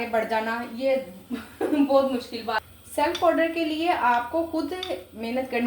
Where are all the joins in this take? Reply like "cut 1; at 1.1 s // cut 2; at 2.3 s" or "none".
cut 1; at 2.7 s